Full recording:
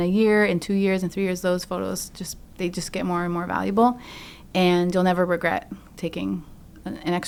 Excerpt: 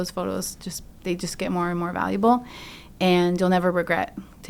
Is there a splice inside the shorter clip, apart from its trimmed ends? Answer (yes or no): no